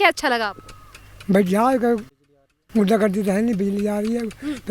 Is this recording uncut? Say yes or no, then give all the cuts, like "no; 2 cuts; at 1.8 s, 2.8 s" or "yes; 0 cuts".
yes; 0 cuts